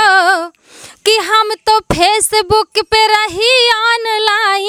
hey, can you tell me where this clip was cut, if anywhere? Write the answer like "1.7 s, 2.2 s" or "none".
none